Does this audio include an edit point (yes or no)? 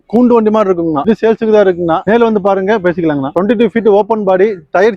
yes